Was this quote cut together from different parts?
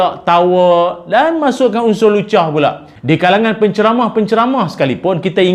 yes; 1 cut; at 2.9 s

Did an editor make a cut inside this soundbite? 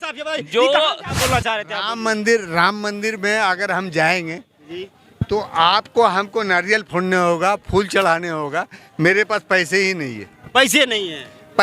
yes; 1 cut; at 1.1 s

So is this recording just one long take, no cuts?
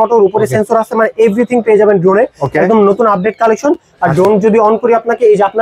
yes; 0 cuts

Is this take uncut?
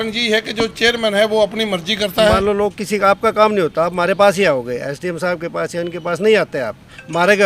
no; 1 cut; at 2.4 s

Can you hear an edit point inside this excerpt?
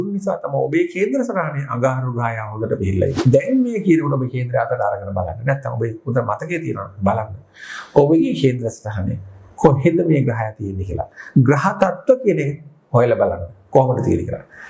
yes; 1 cut; at 3.2 s

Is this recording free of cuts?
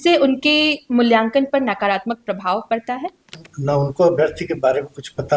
no; 1 cut; at 3.3 s

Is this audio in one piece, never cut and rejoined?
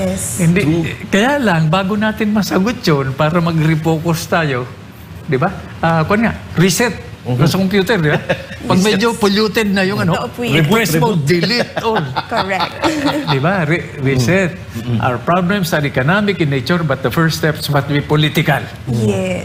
yes; 0 cuts

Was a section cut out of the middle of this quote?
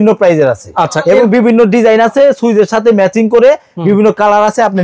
no; 0 cuts

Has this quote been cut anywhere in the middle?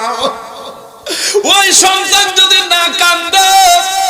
no; 0 cuts

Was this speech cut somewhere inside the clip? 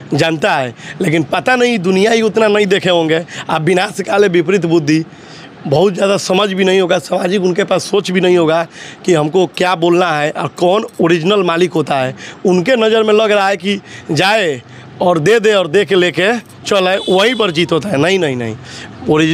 no; 0 cuts

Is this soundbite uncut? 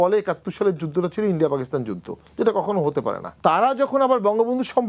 no; 1 cut; at 3.4 s

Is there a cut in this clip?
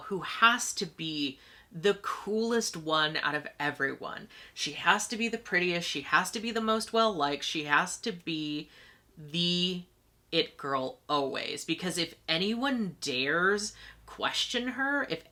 no; 0 cuts

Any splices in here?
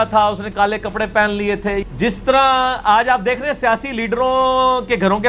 yes; 1 cut; at 1.9 s

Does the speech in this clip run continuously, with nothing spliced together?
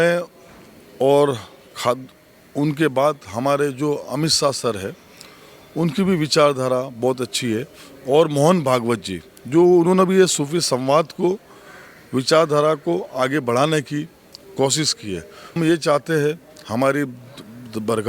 no; 1 cut; at 15.6 s

